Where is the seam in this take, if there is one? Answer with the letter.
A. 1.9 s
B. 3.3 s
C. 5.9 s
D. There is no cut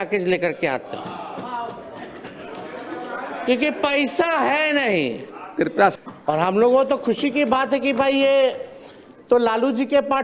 C